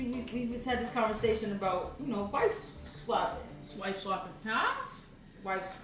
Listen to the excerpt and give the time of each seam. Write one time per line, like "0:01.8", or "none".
none